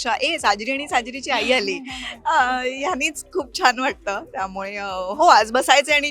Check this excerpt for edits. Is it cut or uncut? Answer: uncut